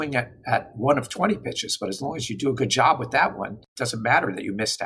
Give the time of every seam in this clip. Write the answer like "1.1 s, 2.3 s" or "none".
3.7 s